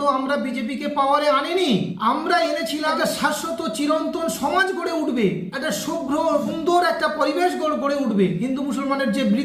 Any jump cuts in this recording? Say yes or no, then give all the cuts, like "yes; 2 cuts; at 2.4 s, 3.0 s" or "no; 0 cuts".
no; 0 cuts